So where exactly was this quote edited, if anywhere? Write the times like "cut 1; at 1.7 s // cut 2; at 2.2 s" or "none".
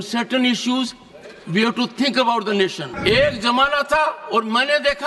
cut 1; at 2.9 s